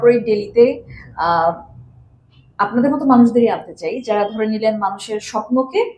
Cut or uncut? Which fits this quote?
uncut